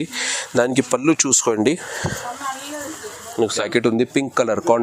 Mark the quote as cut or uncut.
cut